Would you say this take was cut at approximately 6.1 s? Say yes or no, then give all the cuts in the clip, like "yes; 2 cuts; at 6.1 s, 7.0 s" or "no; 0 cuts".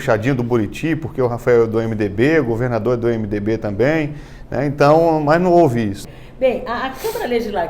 yes; 1 cut; at 6.1 s